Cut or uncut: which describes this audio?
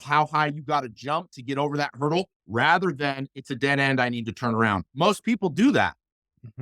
cut